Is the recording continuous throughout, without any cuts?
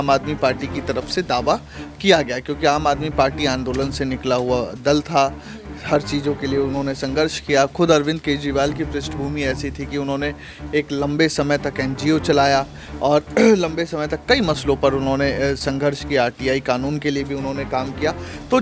yes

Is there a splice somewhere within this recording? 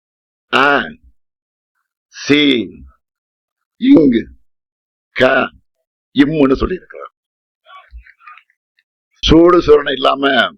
yes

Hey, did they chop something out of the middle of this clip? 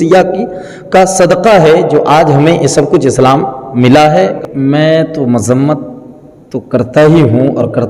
yes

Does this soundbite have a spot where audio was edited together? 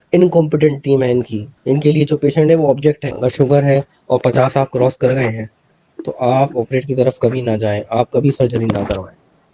yes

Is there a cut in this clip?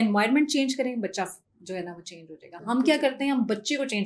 no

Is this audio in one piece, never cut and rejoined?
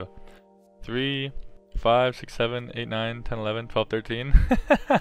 yes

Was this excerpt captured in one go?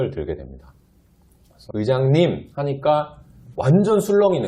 no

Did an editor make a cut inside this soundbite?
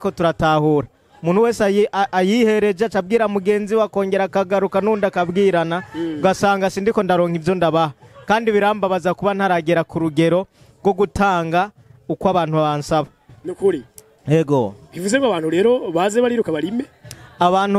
no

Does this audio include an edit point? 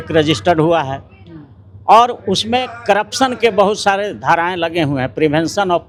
no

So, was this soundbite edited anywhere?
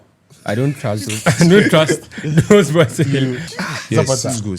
yes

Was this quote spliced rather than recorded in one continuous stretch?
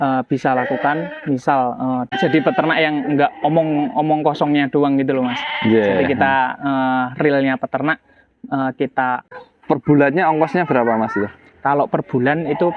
yes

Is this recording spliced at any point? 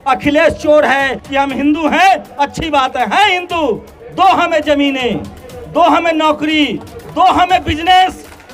yes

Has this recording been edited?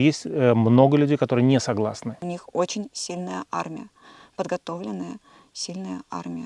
yes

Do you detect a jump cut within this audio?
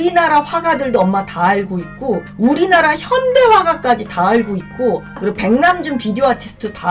no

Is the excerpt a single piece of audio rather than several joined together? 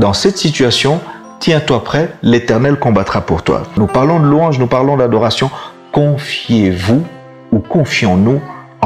no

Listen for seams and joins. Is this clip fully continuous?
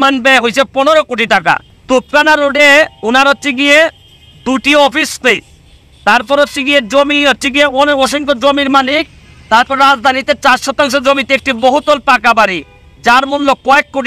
yes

